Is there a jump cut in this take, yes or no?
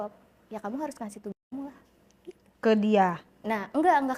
no